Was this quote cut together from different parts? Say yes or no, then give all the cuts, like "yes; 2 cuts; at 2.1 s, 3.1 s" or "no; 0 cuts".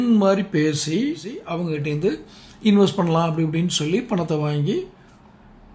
yes; 1 cut; at 1.4 s